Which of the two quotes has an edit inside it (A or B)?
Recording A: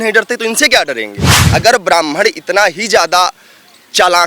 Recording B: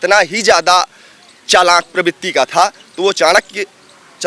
A